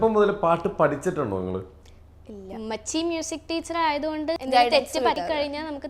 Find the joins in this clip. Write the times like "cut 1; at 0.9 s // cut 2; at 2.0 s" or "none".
cut 1; at 4.4 s // cut 2; at 5.2 s